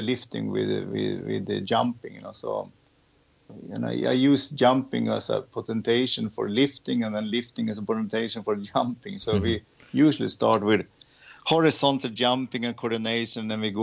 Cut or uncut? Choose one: cut